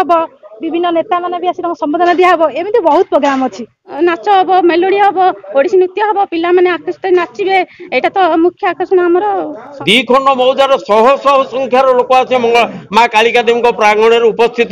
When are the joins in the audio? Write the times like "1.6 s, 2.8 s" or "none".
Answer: 3.8 s, 9.7 s